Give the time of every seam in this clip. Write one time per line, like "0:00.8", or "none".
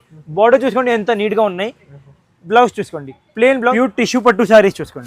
0:03.7